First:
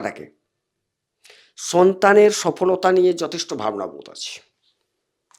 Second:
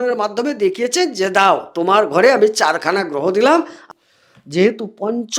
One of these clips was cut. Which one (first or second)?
second